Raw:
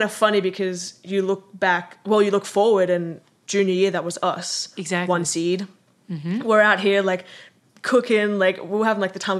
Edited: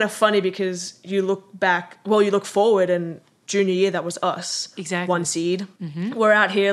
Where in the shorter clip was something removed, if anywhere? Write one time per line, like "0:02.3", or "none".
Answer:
0:05.8